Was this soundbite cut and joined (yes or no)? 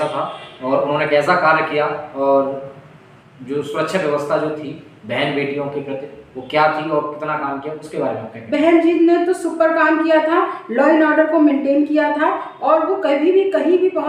no